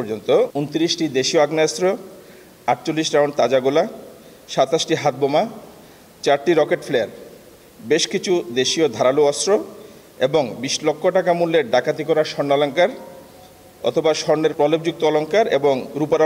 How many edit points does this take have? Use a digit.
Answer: 1